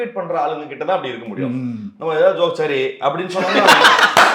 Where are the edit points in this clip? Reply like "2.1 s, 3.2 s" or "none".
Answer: none